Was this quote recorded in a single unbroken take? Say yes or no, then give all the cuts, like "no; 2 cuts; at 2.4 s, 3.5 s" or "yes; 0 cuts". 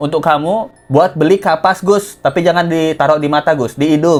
yes; 0 cuts